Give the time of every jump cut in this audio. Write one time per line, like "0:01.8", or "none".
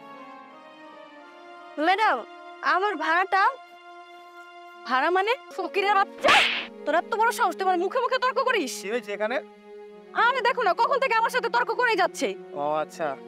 0:01.8
0:05.5